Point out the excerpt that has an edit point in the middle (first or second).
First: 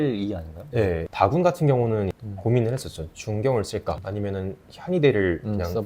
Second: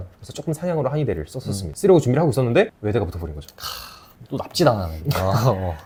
first